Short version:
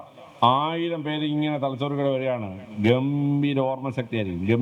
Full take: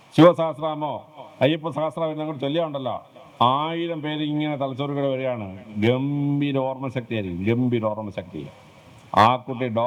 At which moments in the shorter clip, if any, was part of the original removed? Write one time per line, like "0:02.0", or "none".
none